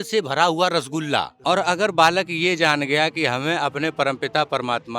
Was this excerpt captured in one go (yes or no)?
no